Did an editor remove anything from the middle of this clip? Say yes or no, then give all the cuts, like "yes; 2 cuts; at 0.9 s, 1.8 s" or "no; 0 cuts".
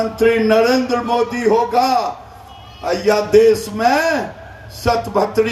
no; 0 cuts